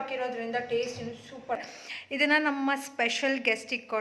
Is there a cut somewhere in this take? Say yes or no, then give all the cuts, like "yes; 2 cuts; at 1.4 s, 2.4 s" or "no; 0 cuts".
yes; 1 cut; at 1.6 s